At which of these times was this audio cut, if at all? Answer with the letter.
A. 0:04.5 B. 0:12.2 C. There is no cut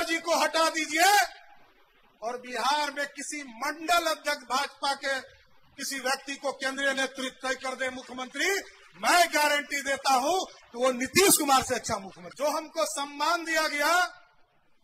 B